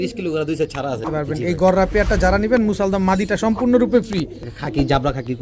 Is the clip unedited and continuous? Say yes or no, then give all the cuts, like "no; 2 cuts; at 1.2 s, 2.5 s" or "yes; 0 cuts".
no; 2 cuts; at 1.1 s, 4.4 s